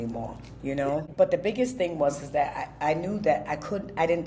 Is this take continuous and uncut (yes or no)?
no